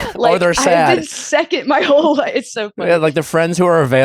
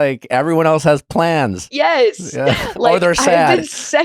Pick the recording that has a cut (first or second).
second